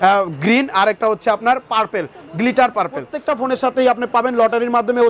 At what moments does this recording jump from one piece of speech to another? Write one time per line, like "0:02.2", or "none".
0:03.1